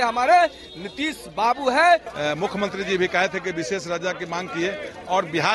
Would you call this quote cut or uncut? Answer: cut